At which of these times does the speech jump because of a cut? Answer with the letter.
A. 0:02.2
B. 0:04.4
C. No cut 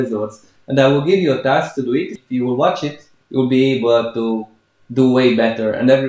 A